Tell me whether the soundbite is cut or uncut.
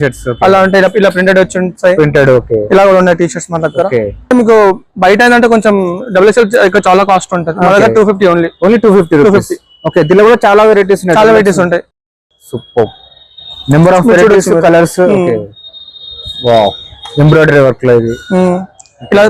cut